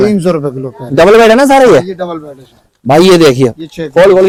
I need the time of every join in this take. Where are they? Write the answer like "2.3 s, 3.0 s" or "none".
none